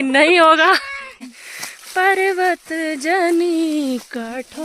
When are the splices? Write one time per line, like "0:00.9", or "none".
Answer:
0:01.2